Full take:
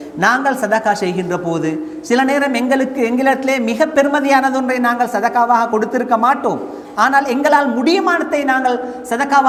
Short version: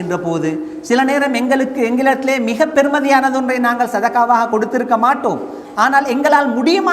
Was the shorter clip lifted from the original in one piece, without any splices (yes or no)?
yes